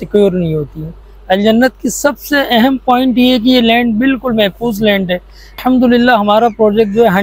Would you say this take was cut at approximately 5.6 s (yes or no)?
yes